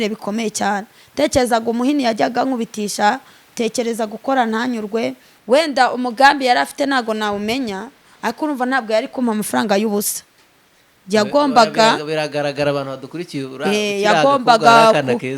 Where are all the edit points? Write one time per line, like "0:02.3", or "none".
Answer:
0:05.3